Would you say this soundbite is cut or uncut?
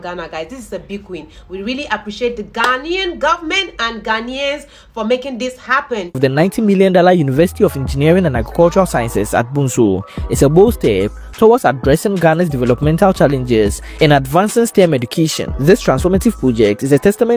cut